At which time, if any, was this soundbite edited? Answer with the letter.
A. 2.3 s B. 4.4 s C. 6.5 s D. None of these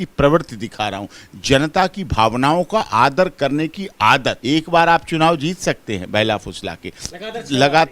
B